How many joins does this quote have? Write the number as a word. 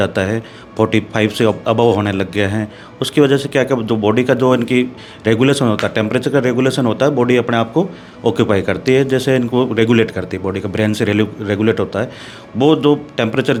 zero